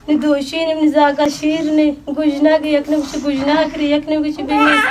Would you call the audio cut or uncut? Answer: cut